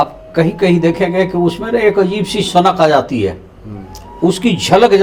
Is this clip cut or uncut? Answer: uncut